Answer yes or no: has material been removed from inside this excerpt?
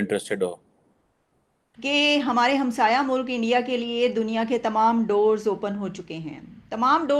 yes